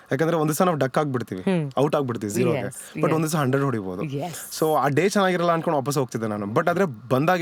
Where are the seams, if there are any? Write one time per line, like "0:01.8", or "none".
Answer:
none